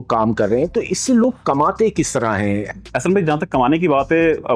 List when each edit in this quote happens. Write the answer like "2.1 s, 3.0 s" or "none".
2.7 s